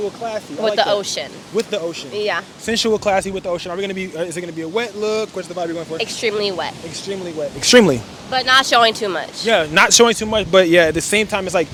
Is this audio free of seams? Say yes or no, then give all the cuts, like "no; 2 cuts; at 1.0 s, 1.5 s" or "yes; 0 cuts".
yes; 0 cuts